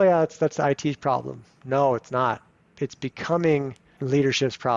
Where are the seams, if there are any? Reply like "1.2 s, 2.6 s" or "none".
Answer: 2.7 s